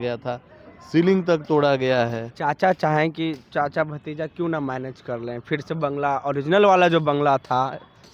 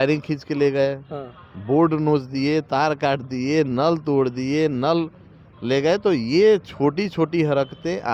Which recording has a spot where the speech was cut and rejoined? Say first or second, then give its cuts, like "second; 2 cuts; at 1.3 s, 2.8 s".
first; 1 cut; at 2.3 s